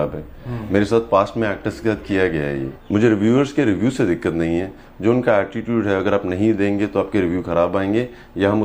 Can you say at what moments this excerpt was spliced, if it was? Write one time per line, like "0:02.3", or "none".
0:02.7